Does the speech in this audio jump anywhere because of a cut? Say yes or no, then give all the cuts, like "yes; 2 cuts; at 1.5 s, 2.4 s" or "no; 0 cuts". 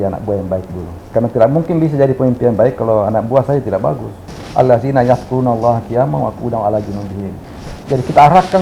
yes; 2 cuts; at 1.0 s, 4.3 s